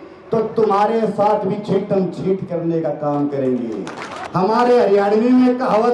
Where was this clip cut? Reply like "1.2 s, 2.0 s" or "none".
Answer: 4.2 s